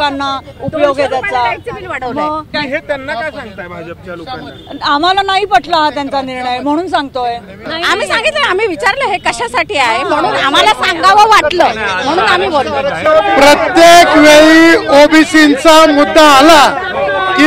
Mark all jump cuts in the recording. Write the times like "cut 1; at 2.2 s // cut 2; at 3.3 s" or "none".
cut 1; at 2.5 s // cut 2; at 7.6 s // cut 3; at 13.1 s